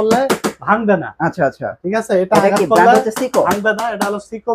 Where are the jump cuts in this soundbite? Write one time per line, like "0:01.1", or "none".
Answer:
none